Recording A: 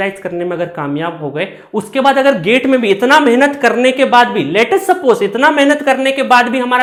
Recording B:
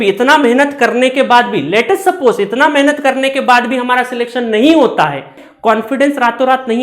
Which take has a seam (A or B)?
B